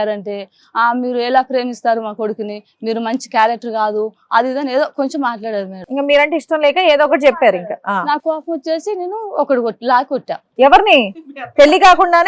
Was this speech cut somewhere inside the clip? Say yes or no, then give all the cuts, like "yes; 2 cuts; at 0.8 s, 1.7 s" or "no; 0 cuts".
no; 0 cuts